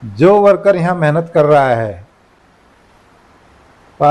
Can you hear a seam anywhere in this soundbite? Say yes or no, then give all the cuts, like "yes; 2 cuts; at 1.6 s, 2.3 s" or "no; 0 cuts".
no; 0 cuts